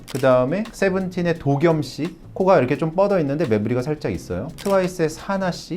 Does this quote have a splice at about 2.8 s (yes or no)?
no